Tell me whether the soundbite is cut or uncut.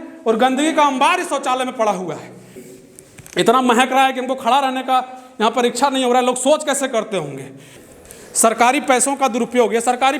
cut